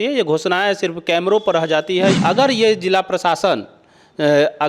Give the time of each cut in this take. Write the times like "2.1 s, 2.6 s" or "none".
2.1 s